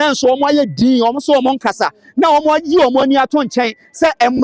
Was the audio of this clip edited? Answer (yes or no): no